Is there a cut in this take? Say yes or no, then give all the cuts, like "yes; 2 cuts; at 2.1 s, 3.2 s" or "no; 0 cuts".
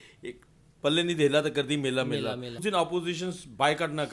yes; 1 cut; at 2.6 s